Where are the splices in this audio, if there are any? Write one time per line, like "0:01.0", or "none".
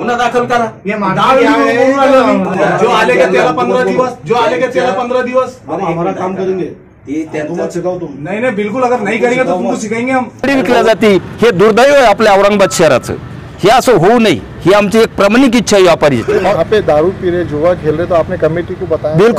0:02.5
0:10.5
0:16.3